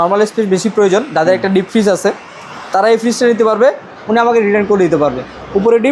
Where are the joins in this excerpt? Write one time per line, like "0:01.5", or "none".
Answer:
0:03.9